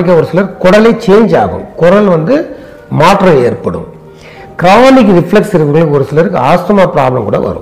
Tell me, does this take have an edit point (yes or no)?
no